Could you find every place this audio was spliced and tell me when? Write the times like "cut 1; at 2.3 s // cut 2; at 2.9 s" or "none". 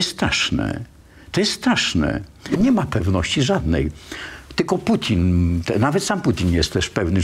cut 1; at 2.6 s